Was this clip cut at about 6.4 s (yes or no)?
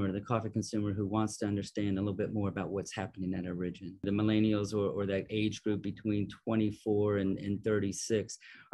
no